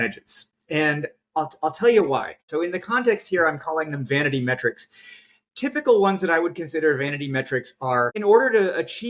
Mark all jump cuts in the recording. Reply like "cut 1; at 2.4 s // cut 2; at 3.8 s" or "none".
cut 1; at 2.4 s // cut 2; at 8.2 s